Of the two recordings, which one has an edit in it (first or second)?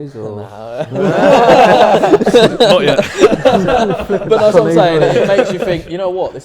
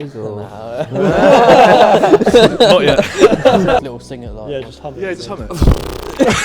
second